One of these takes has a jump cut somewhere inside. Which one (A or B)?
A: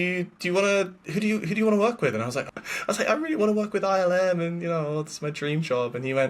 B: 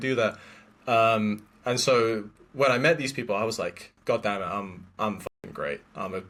A